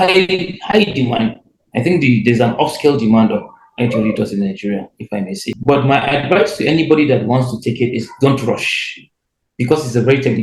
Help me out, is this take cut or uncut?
cut